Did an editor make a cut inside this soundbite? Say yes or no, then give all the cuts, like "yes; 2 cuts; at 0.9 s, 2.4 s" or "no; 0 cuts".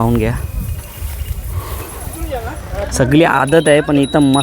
yes; 1 cut; at 2.2 s